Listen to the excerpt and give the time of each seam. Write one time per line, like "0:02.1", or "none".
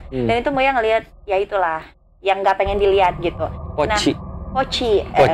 none